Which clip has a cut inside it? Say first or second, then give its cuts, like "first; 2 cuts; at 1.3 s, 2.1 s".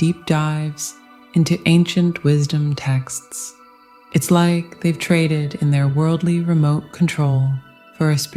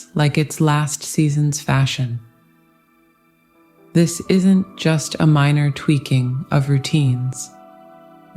second; 2 cuts; at 2.2 s, 3.9 s